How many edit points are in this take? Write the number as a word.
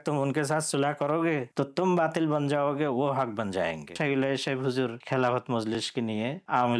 four